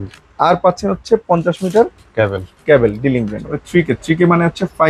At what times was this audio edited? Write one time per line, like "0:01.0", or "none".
0:03.5

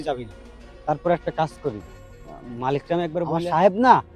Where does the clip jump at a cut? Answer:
0:03.2

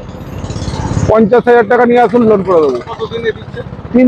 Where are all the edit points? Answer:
none

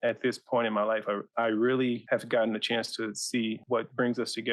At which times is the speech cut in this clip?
0:01.3
0:02.0
0:03.6

